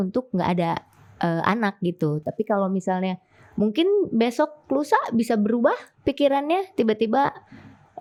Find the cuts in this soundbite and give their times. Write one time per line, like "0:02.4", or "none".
none